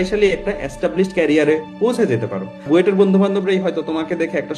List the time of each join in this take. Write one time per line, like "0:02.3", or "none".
0:02.7